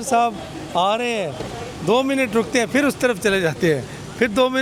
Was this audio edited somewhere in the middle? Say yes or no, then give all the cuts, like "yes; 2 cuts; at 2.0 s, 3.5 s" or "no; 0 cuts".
no; 0 cuts